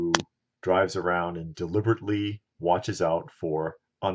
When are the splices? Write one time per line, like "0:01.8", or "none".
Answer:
none